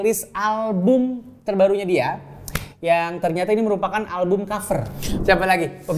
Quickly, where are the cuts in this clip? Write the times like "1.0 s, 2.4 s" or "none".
5.0 s